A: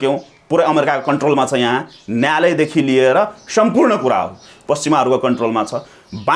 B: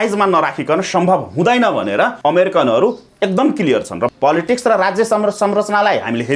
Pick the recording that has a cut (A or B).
B